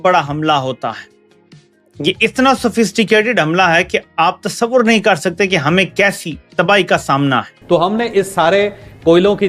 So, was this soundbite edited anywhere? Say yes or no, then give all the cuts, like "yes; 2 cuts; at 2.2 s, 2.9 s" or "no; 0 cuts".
yes; 1 cut; at 7.5 s